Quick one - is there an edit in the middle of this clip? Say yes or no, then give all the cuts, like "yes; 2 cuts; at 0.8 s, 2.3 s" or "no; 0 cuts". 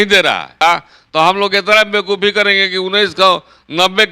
yes; 1 cut; at 0.9 s